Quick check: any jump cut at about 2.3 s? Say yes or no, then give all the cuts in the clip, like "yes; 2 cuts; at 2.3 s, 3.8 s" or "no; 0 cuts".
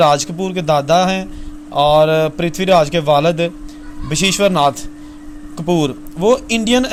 no; 0 cuts